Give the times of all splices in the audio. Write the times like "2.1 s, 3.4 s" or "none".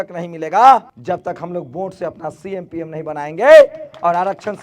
0.9 s